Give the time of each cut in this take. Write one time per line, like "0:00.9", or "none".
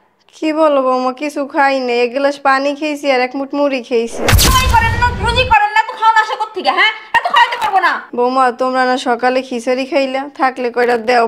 0:04.5